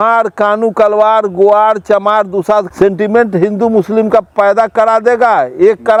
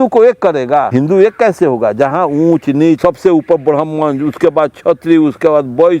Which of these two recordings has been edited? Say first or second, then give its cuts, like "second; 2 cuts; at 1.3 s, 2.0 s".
second; 2 cuts; at 0.9 s, 3.0 s